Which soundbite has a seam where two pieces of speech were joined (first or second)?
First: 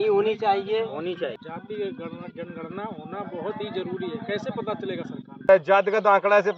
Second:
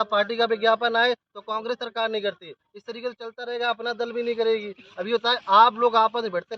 first